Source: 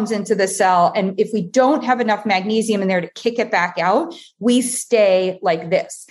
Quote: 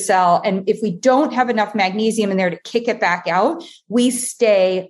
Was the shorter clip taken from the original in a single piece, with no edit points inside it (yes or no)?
yes